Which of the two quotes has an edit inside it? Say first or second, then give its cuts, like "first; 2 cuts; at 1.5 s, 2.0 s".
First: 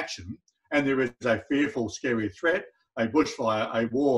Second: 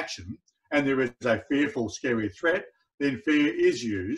second; 1 cut; at 2.8 s